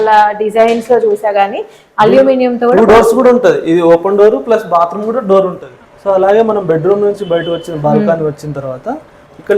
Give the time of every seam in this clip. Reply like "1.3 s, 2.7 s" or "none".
5.7 s